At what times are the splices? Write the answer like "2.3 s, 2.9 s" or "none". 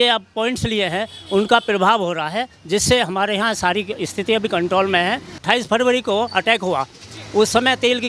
5.4 s